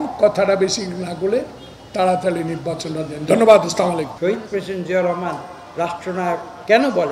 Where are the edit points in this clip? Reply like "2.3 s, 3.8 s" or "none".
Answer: 4.1 s